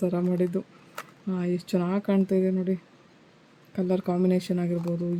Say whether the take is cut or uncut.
uncut